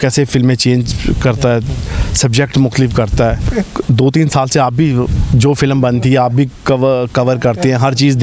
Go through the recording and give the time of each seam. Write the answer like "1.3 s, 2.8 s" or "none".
3.4 s